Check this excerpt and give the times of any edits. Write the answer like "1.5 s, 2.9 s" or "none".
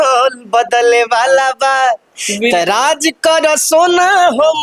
none